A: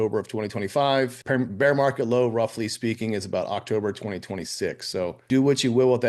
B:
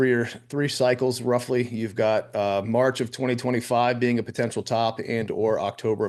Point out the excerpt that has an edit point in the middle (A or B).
A